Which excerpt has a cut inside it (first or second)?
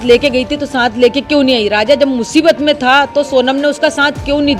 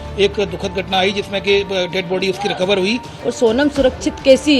second